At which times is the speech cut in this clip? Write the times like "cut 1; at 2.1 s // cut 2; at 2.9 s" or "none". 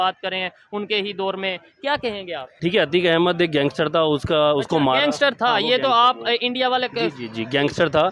cut 1; at 2.5 s